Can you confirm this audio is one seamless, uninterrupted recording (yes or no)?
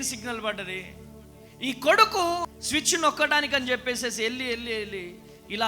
no